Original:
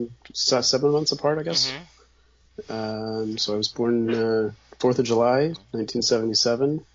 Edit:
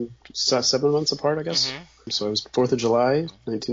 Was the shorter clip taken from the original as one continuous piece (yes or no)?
no